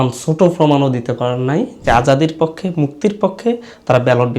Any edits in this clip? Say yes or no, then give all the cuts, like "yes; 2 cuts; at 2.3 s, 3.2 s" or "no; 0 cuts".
yes; 1 cut; at 1.8 s